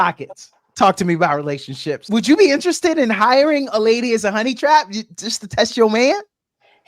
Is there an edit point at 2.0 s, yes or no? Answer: yes